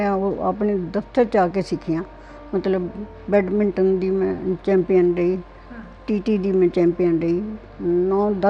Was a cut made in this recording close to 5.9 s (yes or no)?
no